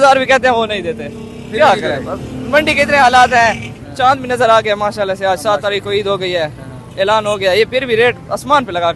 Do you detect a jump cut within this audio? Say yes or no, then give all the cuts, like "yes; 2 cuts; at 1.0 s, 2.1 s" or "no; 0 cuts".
no; 0 cuts